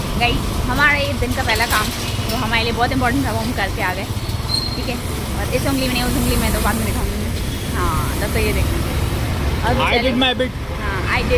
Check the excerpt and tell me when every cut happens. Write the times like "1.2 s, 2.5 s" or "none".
none